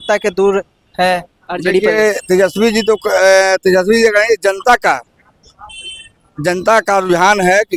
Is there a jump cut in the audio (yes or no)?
no